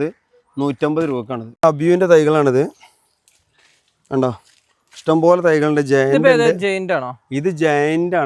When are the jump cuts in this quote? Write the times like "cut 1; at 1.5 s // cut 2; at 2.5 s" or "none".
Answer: cut 1; at 1.4 s